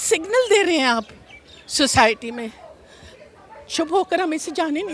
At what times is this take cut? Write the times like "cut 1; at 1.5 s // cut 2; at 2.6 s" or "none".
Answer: none